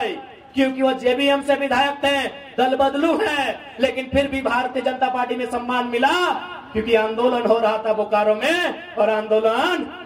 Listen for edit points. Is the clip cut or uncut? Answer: uncut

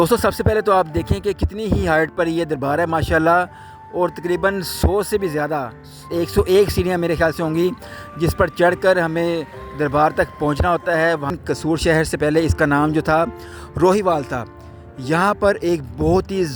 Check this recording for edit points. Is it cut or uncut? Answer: cut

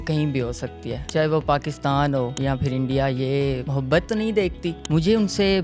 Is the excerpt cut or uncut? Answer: cut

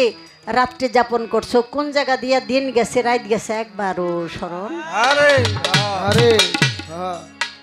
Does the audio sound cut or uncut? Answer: uncut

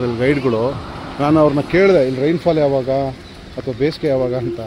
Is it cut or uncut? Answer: uncut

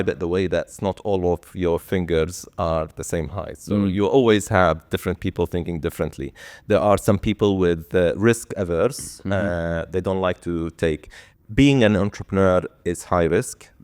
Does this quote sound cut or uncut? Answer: uncut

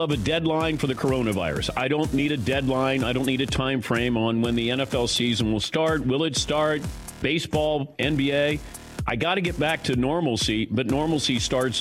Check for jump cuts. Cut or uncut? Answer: uncut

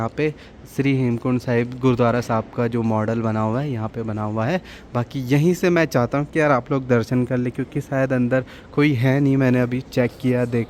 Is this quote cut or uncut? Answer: uncut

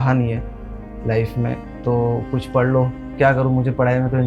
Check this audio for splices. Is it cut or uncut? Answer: cut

